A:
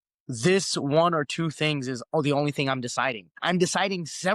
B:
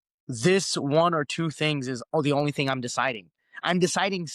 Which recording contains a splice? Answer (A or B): A